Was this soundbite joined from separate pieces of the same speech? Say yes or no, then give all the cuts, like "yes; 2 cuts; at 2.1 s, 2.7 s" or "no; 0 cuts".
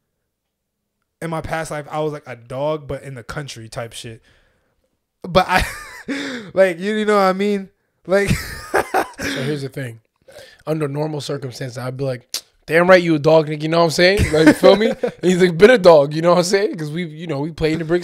no; 0 cuts